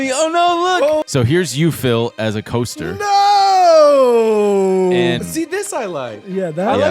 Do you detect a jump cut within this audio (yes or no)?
yes